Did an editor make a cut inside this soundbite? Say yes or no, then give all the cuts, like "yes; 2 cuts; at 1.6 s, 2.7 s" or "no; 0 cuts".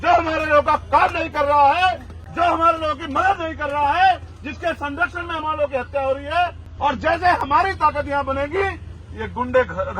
yes; 1 cut; at 6.7 s